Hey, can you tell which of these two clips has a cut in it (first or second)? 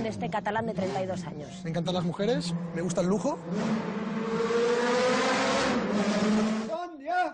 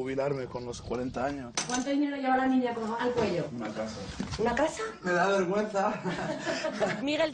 second